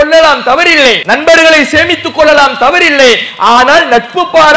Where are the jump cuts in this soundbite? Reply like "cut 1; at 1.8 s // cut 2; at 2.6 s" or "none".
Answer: cut 1; at 1.0 s